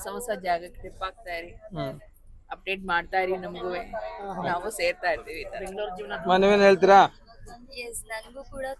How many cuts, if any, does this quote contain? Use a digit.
0